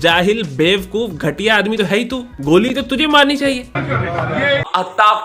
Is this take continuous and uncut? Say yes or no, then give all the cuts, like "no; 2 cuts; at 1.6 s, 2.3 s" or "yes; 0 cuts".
yes; 0 cuts